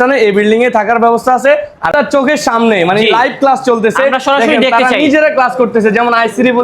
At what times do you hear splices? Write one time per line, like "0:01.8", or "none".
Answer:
0:01.9